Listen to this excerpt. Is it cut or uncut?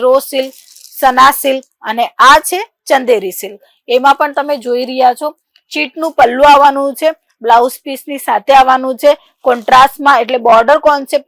uncut